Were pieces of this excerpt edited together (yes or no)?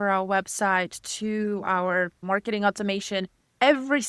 yes